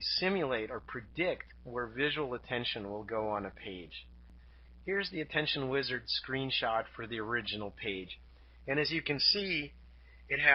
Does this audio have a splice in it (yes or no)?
yes